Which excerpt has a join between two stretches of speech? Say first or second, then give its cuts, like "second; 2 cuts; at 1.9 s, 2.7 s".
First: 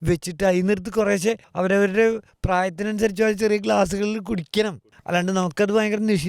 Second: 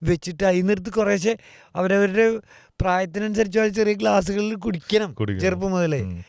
first; 3 cuts; at 1.5 s, 2.3 s, 4.8 s